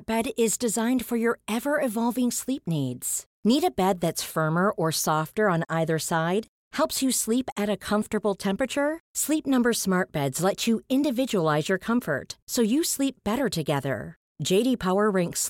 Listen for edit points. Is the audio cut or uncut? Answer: uncut